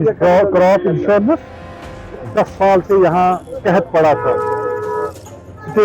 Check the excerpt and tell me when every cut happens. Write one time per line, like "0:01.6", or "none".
0:01.9